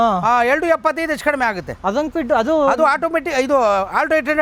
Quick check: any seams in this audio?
no; 0 cuts

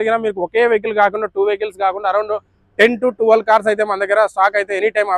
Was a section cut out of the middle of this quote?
no; 0 cuts

